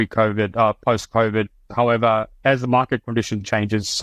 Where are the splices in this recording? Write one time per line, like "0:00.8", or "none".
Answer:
0:01.6